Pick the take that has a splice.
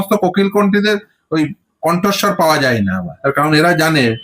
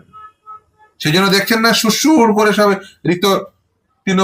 first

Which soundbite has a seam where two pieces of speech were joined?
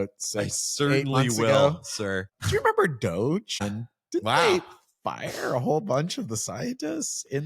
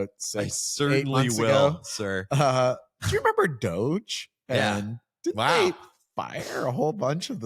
first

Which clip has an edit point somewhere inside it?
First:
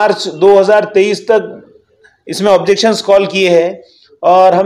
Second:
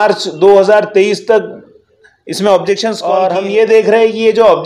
second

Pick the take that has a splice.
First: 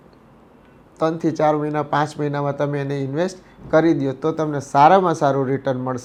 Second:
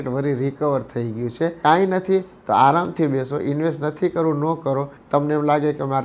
second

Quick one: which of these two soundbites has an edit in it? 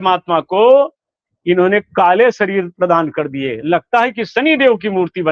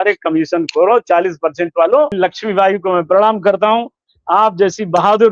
second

